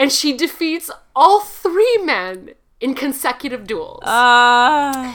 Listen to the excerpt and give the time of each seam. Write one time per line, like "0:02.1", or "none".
none